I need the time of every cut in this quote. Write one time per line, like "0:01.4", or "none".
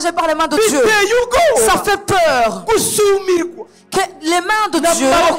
none